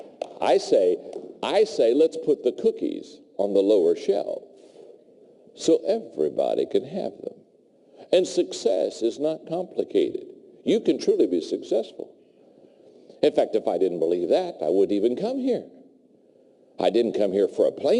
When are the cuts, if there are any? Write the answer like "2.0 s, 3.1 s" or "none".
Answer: none